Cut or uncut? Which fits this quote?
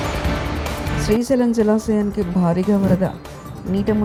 uncut